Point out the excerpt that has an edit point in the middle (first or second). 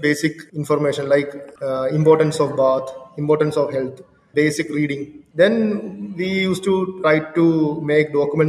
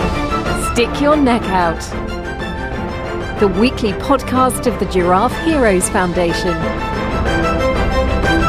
first